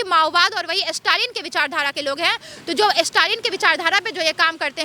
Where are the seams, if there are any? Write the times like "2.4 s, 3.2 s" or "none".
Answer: none